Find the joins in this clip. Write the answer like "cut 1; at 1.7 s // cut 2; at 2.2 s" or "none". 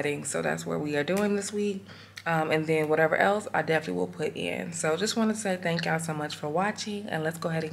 none